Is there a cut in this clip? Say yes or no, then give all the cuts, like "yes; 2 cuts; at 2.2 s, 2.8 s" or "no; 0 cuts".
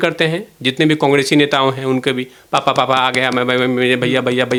no; 0 cuts